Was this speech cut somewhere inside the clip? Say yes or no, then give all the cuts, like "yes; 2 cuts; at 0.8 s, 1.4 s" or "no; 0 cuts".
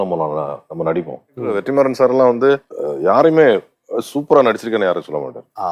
yes; 1 cut; at 1.5 s